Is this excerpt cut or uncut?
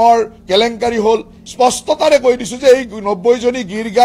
cut